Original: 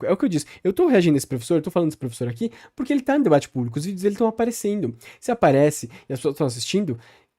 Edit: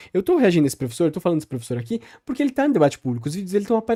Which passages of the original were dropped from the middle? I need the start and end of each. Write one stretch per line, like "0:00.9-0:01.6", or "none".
none